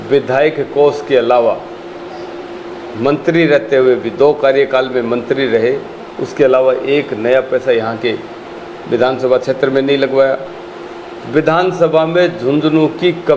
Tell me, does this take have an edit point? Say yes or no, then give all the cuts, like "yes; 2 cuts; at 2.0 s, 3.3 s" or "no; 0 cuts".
no; 0 cuts